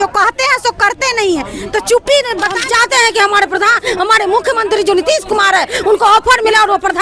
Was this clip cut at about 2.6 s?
yes; 1 cut; at 2.6 s

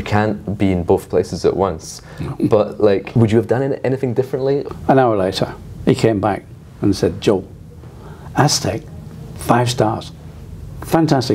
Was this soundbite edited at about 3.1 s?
yes; 2 cuts; at 3.1 s, 4.7 s

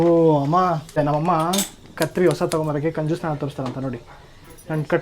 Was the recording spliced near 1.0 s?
yes; 1 cut; at 1.0 s

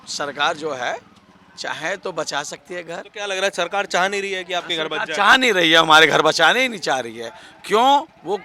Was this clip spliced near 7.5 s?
no; 1 cut; at 3.1 s

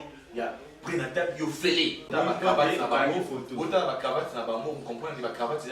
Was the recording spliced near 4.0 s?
no; 1 cut; at 2.0 s

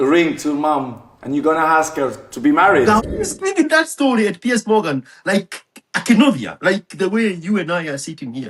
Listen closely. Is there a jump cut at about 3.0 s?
yes; 1 cut; at 3.0 s

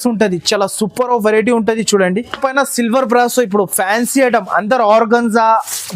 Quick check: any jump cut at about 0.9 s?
no; 1 cut; at 2.3 s

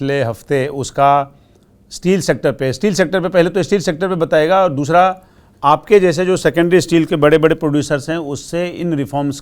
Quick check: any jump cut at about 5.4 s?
no; 0 cuts

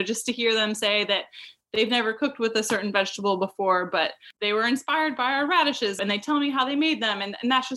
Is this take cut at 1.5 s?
no; 2 cuts; at 4.3 s, 6.0 s

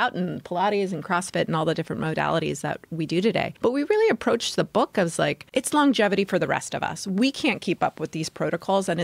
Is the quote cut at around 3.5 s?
yes; 2 cuts; at 3.5 s, 5.4 s

